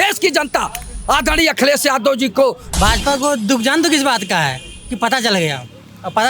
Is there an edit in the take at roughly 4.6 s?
no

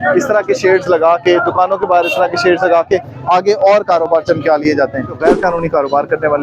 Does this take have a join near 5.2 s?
yes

